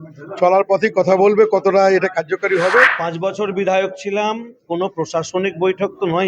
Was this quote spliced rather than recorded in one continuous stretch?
yes; 1 cut; at 3.0 s

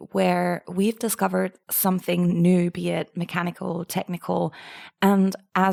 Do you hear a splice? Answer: no; 0 cuts

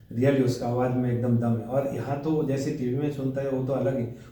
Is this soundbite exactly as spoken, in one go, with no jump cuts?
yes; 0 cuts

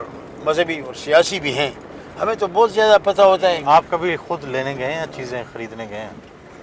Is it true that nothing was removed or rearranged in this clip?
yes; 0 cuts

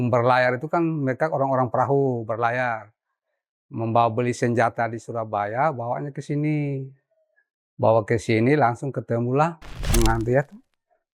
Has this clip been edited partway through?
yes; 1 cut; at 9.9 s

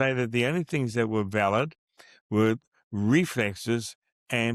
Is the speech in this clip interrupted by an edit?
no; 0 cuts

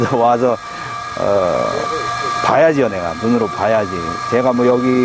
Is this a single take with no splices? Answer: yes; 0 cuts

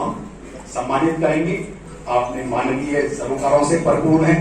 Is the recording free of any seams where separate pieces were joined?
no; 1 cut; at 1.8 s

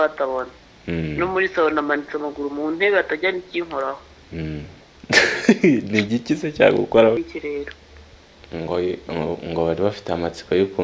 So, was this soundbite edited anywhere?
yes; 1 cut; at 7.2 s

